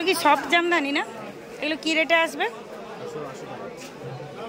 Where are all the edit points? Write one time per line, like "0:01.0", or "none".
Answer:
none